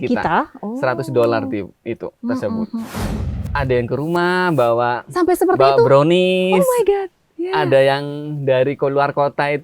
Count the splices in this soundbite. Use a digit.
1